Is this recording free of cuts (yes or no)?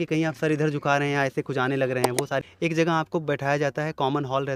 no